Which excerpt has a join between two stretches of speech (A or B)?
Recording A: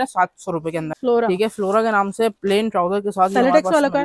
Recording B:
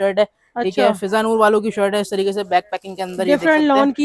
A